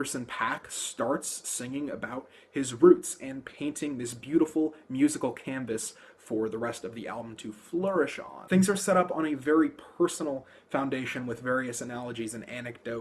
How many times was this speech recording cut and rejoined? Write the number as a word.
one